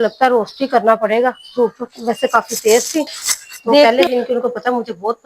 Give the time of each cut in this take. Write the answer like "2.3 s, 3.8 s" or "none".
3.8 s

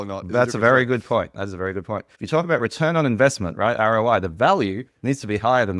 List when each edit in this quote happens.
2.1 s

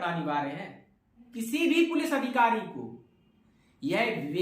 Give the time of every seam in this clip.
1.2 s

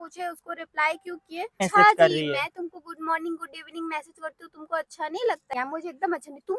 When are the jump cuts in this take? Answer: 1.7 s, 5.4 s

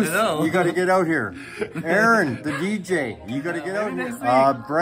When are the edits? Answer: 3.8 s

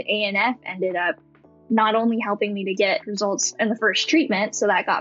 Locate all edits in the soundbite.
none

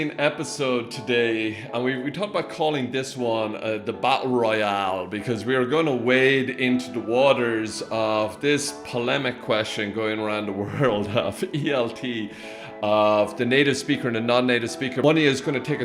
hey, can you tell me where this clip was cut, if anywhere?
1.7 s

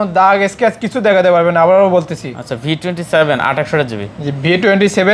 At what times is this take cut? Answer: none

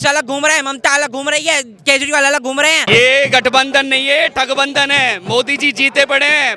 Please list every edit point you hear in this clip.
2.8 s

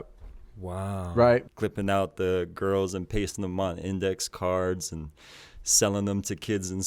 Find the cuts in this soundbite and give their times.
1.5 s

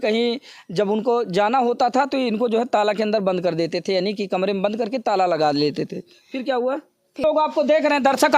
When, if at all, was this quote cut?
7.2 s

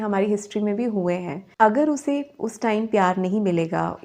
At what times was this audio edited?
1.4 s

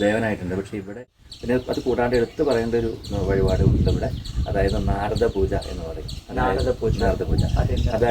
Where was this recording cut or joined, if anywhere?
1.5 s

